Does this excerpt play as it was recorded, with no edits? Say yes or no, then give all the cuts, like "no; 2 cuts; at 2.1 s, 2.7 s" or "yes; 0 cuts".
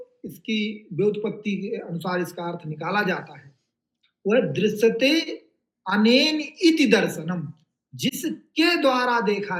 yes; 0 cuts